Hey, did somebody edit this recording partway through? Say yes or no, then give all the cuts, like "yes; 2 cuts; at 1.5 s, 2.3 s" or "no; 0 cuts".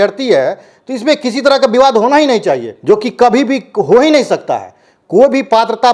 yes; 1 cut; at 2.7 s